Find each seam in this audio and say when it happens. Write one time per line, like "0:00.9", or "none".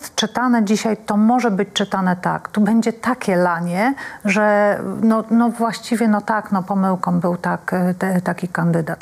none